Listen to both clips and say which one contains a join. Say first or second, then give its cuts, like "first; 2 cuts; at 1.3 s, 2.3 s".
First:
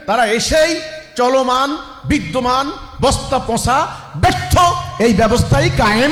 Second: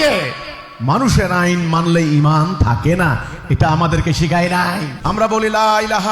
second; 1 cut; at 4.9 s